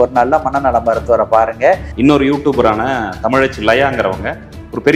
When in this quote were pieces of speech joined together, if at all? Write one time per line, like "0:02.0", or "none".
0:01.9